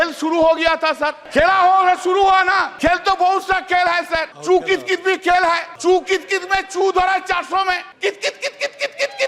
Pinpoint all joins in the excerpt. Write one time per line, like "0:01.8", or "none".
0:01.2
0:02.7
0:04.3
0:05.7
0:07.9